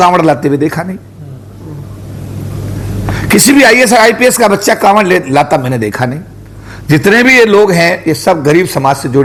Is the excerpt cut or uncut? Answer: uncut